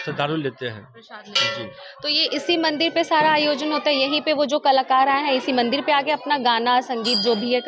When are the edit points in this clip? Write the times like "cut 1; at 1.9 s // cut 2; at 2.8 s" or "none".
none